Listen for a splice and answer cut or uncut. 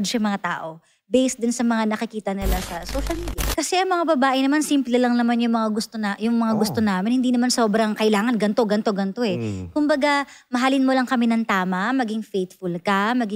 cut